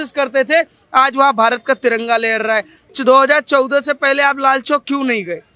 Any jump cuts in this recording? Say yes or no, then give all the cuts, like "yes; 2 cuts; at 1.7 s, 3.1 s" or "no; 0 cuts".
yes; 1 cut; at 2.8 s